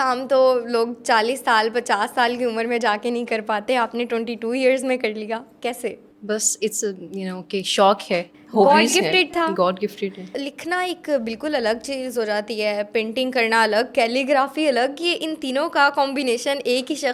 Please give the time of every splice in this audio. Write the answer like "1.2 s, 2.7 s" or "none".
none